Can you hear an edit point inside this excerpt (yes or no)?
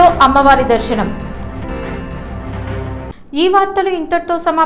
no